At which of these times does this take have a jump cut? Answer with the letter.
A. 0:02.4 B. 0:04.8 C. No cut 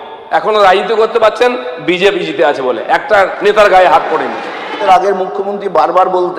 B